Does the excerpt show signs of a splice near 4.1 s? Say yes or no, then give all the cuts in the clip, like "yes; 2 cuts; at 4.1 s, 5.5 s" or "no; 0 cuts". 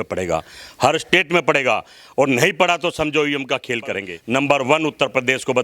yes; 1 cut; at 4.1 s